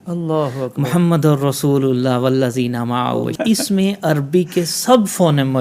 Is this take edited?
yes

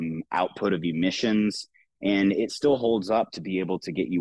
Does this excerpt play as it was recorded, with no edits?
yes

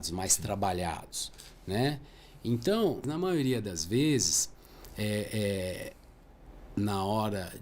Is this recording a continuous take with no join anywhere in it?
no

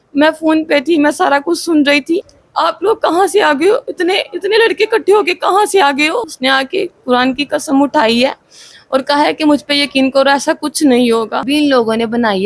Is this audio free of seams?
no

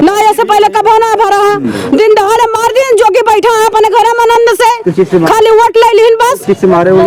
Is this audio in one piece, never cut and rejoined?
yes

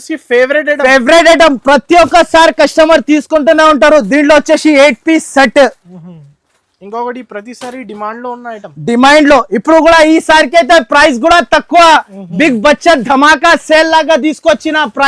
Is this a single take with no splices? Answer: yes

